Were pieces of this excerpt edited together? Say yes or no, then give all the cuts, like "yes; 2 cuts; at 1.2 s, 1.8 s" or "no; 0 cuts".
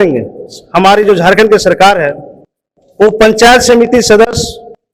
no; 0 cuts